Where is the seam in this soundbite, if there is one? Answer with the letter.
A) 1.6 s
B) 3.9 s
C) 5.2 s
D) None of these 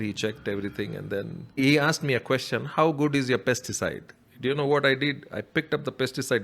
A